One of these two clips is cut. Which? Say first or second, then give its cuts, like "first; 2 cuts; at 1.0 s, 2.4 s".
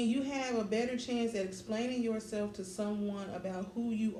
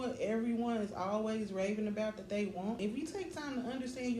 second; 1 cut; at 2.8 s